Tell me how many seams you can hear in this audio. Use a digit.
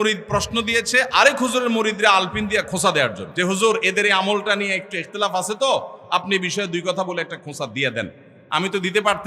1